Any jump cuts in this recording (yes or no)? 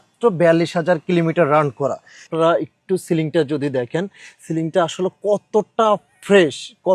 yes